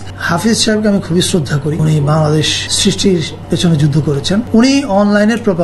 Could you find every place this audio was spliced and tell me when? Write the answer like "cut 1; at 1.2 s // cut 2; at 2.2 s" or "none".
cut 1; at 1.8 s // cut 2; at 2.6 s // cut 3; at 3.3 s // cut 4; at 4.5 s